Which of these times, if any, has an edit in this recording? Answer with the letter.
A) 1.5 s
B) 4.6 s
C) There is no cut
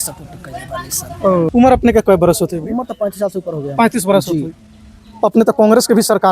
A